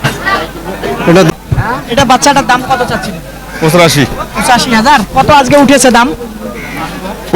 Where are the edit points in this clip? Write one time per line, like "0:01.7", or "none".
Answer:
0:01.3